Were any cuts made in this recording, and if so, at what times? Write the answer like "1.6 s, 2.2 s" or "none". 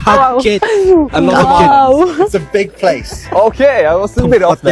none

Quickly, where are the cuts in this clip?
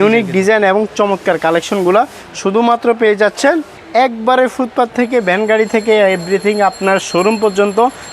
3.8 s

